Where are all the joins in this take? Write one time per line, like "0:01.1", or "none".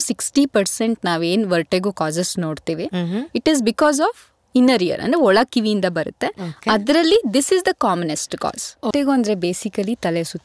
0:08.9

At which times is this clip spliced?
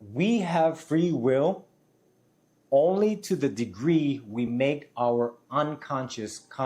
none

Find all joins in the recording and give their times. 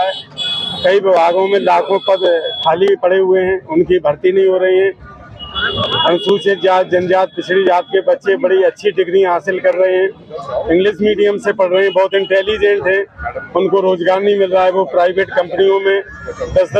none

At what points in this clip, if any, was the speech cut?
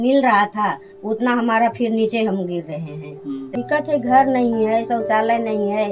0:03.5

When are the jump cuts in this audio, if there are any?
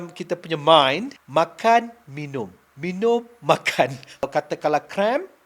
0:01.2
0:04.3

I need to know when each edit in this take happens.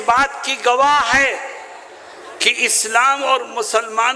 none

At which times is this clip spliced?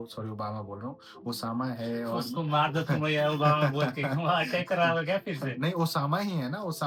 none

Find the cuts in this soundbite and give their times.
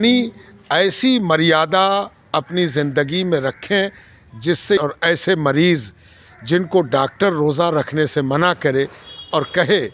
0:04.8

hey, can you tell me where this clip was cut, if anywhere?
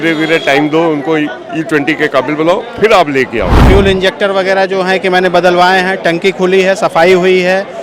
0:03.6

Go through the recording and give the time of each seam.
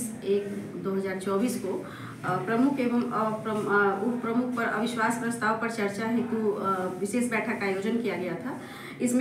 none

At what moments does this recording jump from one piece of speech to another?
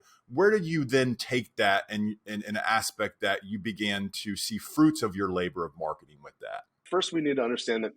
0:06.8

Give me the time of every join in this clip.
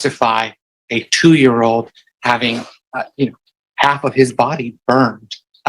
0:02.8

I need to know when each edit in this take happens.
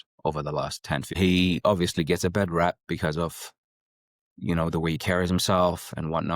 0:01.2

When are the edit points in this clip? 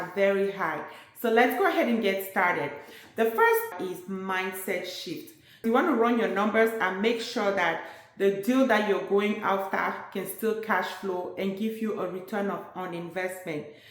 0:03.7
0:05.7

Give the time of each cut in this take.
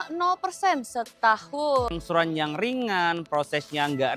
0:01.9

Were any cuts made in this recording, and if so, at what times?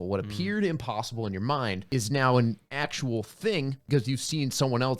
0:01.8
0:02.7
0:03.8

